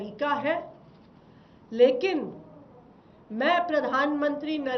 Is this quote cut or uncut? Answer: uncut